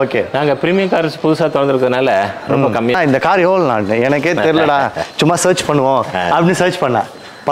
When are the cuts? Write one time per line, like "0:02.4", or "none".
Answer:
0:03.0